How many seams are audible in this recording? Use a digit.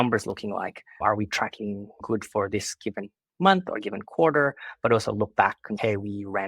1